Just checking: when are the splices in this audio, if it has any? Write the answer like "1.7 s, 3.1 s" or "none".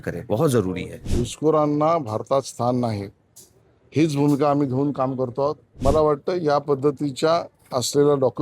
1.0 s, 5.7 s

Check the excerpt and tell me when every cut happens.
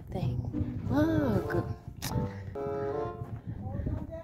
2.6 s

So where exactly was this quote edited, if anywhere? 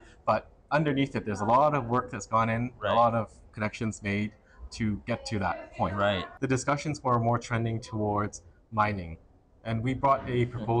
6.3 s

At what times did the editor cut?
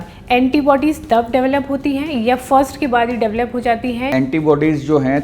4.1 s

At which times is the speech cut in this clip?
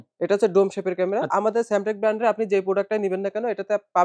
1.3 s

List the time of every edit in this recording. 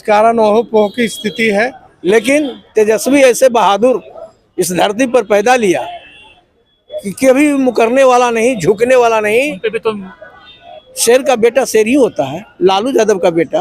1.9 s, 10.1 s

